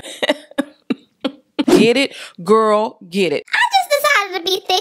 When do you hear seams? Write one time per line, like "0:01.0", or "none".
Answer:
0:01.6
0:03.5